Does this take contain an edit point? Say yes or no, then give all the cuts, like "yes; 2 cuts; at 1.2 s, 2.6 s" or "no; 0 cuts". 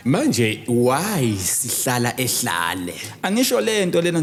no; 0 cuts